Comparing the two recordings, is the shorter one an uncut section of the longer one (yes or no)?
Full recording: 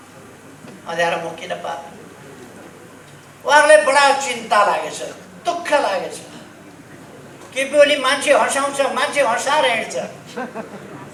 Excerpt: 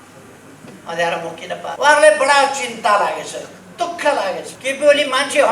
no